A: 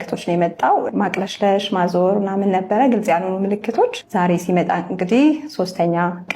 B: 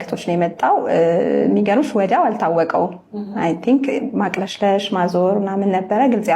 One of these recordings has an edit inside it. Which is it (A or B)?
A